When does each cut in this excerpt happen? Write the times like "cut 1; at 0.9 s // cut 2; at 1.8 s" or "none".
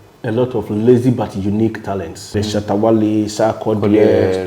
cut 1; at 2.3 s